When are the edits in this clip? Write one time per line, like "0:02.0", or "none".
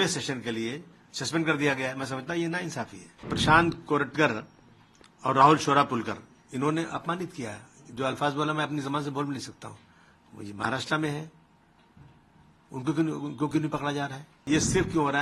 0:03.3
0:14.4